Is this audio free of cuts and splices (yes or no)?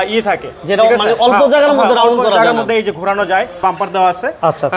no